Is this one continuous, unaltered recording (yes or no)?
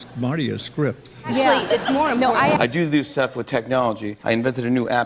no